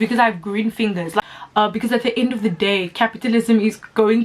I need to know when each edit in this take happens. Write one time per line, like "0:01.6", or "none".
0:01.2